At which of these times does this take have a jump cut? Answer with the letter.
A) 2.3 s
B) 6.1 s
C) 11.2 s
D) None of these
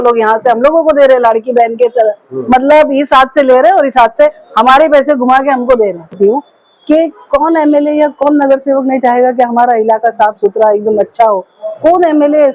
B